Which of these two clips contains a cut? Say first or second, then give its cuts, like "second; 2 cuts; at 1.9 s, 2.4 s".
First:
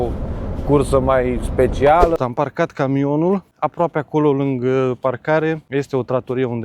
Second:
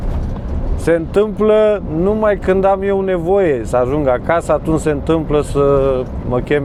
first; 3 cuts; at 2.2 s, 3.6 s, 5.6 s